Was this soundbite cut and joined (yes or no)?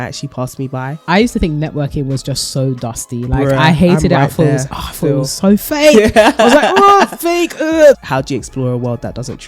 yes